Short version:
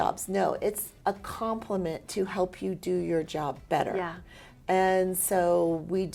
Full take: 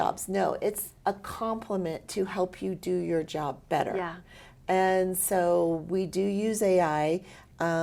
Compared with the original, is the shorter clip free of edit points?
yes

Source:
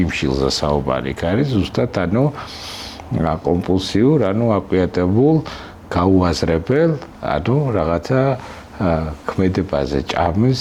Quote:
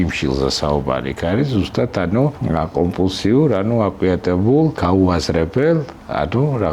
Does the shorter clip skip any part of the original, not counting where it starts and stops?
yes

